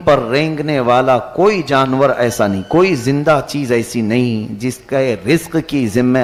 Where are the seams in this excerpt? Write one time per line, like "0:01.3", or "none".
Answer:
none